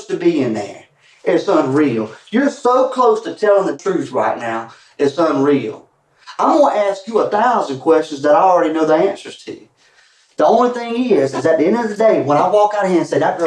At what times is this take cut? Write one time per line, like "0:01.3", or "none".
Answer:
0:03.8